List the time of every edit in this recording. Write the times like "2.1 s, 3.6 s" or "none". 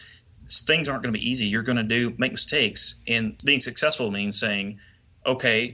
3.4 s